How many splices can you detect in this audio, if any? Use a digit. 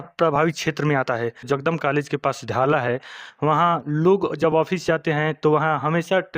1